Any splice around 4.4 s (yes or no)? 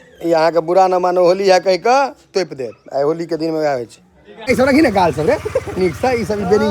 yes